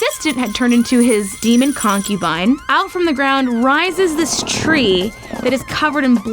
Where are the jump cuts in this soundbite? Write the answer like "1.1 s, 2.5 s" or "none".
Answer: 1.3 s, 2.6 s